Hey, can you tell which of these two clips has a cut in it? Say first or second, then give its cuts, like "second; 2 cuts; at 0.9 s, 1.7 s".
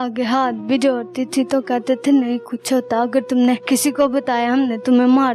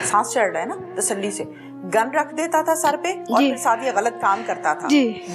first; 1 cut; at 3.6 s